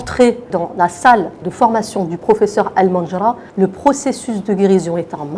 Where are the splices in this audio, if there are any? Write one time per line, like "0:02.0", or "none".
none